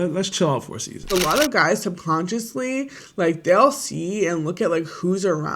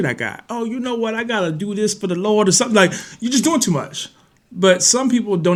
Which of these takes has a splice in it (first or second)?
first